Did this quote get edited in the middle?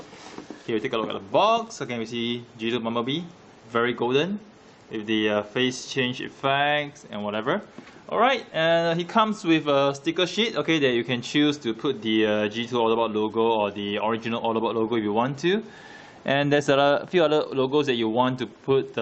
yes; 1 cut; at 13.9 s

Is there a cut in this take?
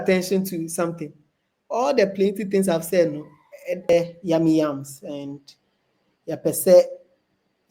yes; 1 cut; at 3.9 s

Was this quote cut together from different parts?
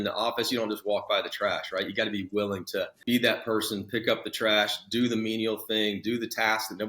yes; 1 cut; at 3.0 s

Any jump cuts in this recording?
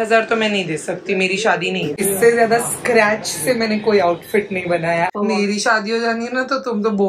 yes; 2 cuts; at 1.9 s, 5.1 s

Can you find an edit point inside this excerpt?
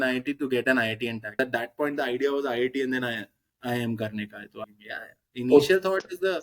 yes; 2 cuts; at 1.4 s, 4.7 s

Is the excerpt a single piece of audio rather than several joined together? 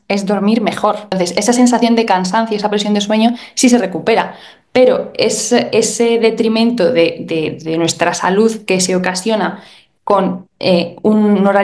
no; 1 cut; at 1.1 s

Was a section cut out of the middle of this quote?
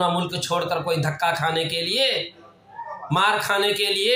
no; 0 cuts

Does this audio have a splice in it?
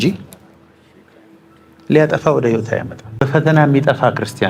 yes; 1 cut; at 3.2 s

